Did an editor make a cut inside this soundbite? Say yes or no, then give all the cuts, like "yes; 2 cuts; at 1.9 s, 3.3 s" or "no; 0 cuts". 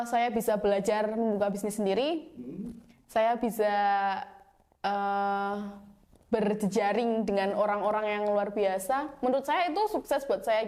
no; 0 cuts